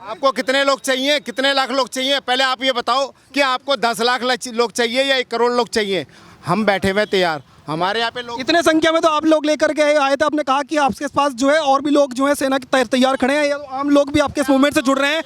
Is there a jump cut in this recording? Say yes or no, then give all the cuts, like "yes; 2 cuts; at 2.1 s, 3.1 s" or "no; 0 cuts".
no; 0 cuts